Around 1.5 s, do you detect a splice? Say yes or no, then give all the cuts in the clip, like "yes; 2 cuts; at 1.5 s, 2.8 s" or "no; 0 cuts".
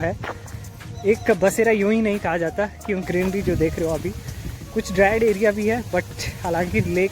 no; 1 cut; at 3.1 s